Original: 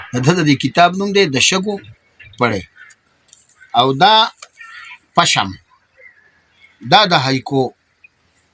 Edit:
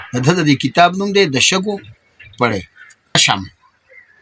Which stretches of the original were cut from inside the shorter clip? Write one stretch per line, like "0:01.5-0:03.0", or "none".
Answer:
0:03.1-0:05.2